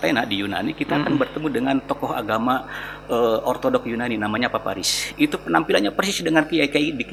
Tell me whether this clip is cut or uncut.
uncut